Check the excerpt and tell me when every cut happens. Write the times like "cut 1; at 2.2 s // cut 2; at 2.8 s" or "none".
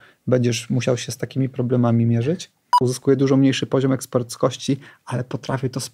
cut 1; at 2.8 s